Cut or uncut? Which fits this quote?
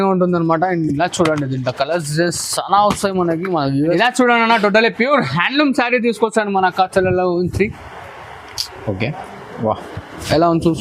cut